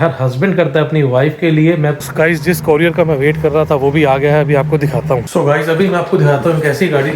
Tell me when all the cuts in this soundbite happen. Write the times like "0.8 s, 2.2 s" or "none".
2.0 s, 5.2 s